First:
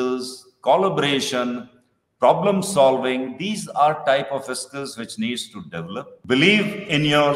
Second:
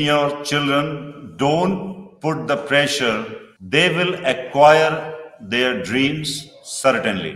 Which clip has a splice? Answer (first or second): first